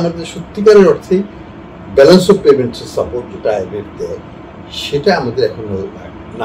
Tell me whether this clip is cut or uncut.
uncut